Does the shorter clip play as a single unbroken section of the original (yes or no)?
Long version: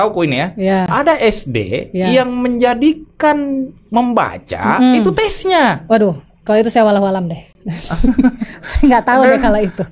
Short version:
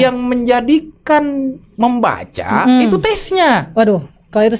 yes